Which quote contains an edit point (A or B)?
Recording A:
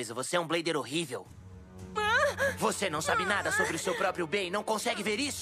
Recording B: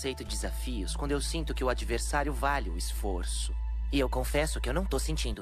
A